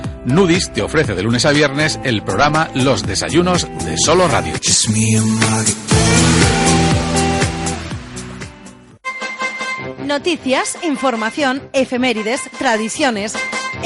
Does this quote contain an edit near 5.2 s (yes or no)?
no